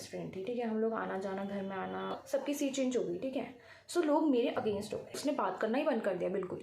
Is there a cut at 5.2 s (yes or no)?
yes